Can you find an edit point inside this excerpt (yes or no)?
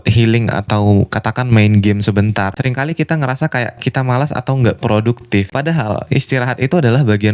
yes